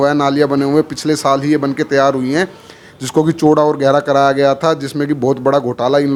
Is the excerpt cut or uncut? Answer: uncut